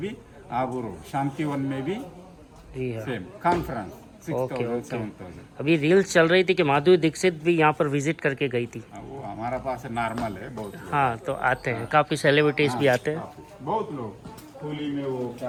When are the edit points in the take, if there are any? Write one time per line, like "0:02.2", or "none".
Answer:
none

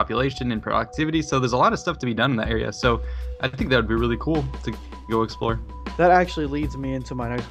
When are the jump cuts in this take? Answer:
none

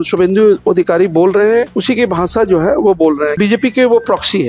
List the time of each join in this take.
0:01.7
0:03.4

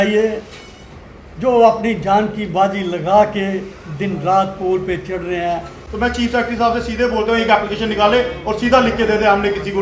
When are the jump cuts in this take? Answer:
0:05.9

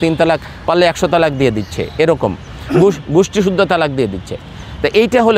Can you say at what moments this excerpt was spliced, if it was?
none

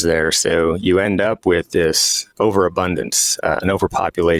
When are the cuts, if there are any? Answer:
none

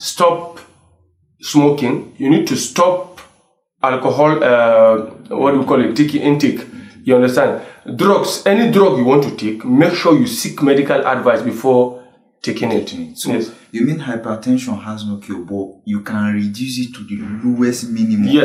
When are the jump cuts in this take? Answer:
none

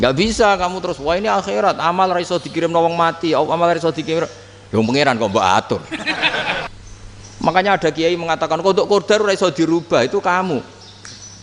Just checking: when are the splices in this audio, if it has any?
0:06.7

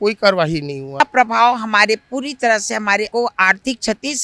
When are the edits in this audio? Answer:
0:01.0
0:03.1

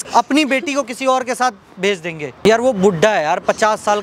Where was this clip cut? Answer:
0:02.5

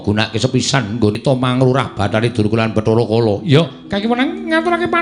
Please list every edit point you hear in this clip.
0:01.2

